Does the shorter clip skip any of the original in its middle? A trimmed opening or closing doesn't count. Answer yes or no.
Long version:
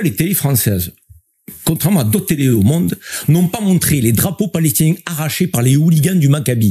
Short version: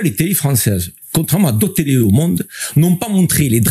yes